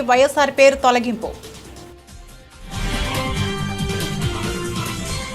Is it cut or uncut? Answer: cut